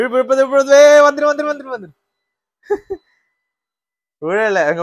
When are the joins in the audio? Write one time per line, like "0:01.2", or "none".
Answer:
none